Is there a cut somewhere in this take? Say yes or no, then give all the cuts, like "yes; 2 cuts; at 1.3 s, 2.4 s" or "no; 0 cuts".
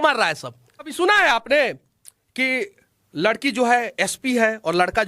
yes; 1 cut; at 0.9 s